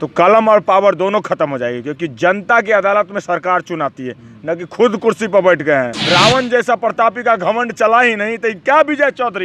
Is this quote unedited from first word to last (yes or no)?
no